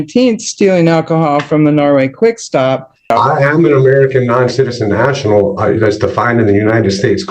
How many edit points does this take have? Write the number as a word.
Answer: one